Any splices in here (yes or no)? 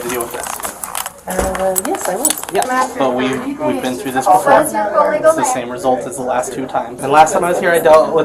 yes